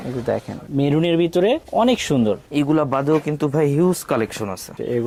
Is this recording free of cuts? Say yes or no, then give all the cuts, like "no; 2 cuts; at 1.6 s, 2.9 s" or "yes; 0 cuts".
yes; 0 cuts